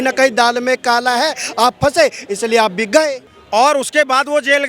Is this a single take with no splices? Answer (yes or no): no